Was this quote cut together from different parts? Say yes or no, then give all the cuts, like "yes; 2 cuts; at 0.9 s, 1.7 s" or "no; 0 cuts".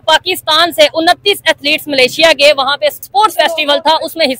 yes; 1 cut; at 3.0 s